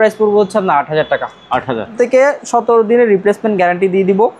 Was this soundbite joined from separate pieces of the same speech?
yes; 1 cut; at 1.9 s

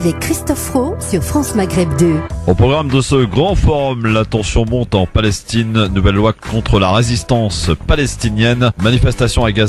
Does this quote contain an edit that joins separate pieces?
yes; 1 cut; at 5.2 s

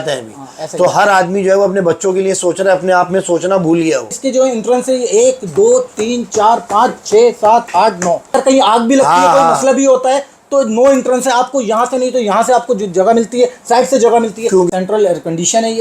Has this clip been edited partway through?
yes; 3 cuts; at 4.1 s, 8.3 s, 14.7 s

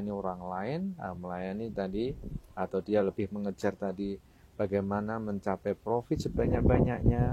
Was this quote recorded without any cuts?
yes; 0 cuts

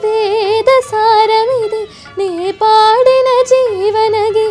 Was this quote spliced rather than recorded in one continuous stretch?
no; 0 cuts

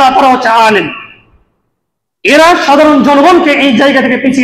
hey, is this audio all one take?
yes; 0 cuts

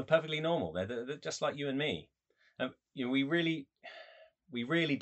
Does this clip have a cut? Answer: no; 0 cuts

